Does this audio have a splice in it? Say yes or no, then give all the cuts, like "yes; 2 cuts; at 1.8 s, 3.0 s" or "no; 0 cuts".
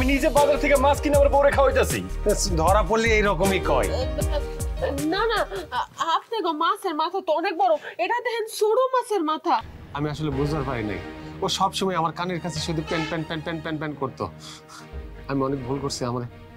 yes; 1 cut; at 9.7 s